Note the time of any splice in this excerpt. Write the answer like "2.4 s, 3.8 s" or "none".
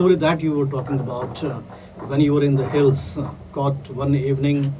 none